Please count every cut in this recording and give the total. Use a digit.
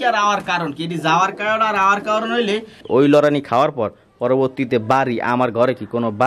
1